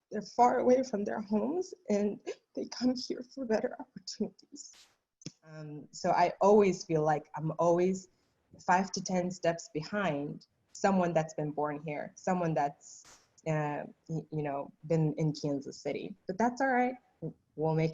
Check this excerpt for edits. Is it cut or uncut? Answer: cut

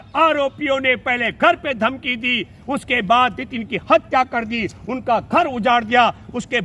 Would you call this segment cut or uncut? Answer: uncut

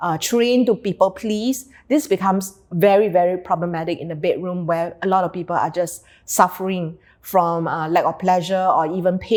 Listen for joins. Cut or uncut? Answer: uncut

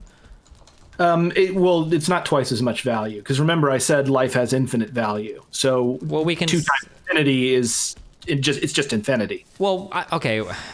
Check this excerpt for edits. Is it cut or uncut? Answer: uncut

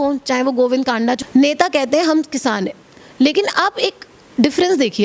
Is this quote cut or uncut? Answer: cut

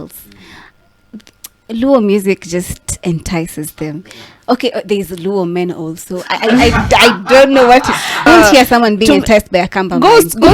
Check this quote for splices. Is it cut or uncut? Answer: cut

